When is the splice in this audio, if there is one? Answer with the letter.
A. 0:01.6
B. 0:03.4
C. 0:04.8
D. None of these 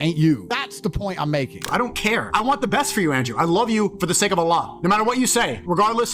A